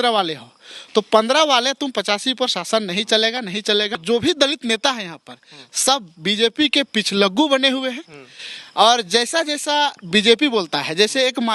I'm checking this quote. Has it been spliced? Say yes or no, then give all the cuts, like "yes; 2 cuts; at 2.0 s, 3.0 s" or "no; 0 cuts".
yes; 1 cut; at 4.0 s